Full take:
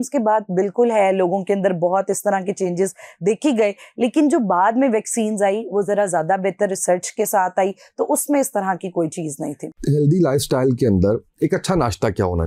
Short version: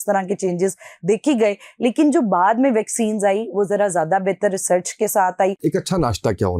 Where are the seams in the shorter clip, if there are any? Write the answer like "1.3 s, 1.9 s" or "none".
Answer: 5.6 s